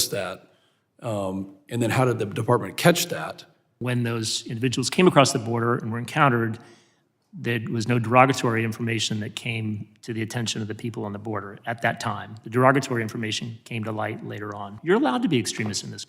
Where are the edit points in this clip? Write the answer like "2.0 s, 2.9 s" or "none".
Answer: 3.7 s, 14.7 s